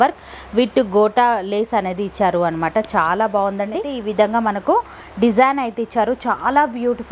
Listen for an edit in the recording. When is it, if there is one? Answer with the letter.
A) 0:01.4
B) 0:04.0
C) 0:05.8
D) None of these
B